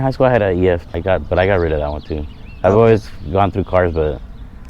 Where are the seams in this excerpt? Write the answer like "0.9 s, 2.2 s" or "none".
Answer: 0.9 s